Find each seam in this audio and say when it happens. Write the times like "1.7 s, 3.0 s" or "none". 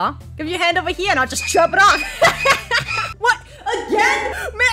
3.1 s